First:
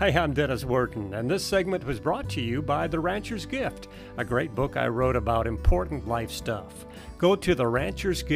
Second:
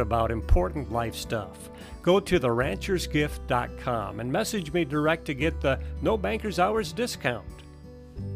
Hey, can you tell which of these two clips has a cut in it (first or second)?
second